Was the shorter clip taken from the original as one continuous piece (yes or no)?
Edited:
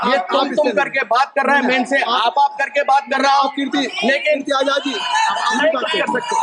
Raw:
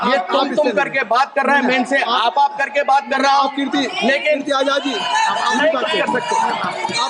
yes